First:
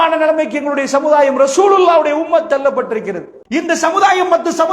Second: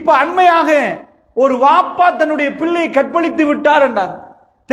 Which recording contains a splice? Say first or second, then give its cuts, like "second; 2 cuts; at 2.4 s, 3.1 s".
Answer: first; 1 cut; at 3.3 s